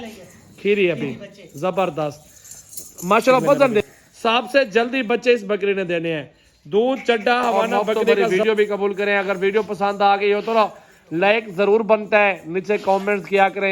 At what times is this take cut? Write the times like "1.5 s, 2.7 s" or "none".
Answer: 3.8 s, 8.2 s